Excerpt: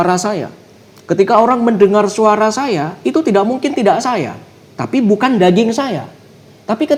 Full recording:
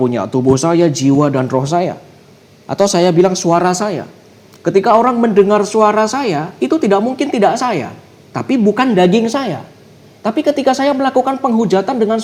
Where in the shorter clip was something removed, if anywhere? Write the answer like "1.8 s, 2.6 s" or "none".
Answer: none